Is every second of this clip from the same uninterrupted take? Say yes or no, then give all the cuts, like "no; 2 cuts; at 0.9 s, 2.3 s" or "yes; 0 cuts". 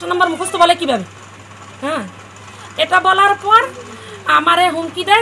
yes; 0 cuts